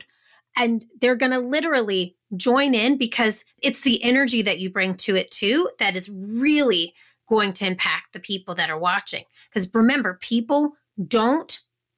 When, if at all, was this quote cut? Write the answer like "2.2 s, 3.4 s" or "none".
3.5 s